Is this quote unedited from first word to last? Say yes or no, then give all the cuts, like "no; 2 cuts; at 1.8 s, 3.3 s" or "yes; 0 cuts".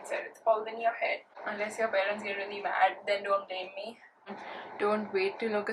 no; 2 cuts; at 1.3 s, 4.4 s